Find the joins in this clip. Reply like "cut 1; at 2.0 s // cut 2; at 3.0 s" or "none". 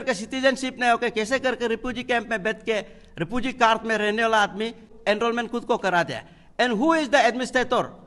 cut 1; at 4.9 s